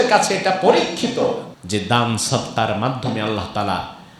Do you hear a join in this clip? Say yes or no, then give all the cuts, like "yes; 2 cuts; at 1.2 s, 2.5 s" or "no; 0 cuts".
yes; 1 cut; at 1.5 s